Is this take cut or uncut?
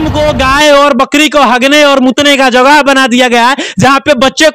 uncut